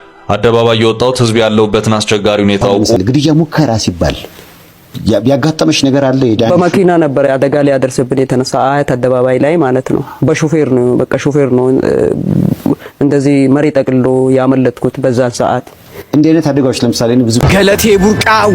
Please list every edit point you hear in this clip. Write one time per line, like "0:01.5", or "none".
0:03.0
0:17.4